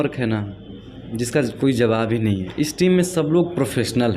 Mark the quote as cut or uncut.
uncut